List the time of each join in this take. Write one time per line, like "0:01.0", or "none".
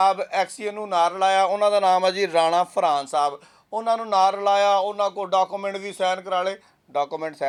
none